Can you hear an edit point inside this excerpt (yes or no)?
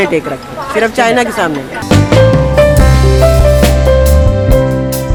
no